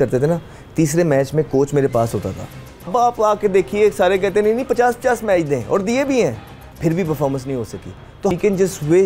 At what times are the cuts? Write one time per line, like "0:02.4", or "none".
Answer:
0:02.9
0:08.3